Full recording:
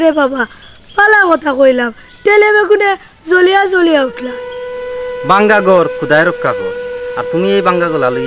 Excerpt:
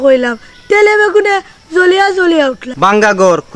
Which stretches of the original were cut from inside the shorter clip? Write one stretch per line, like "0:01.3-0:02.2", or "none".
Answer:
0:04.2-0:05.1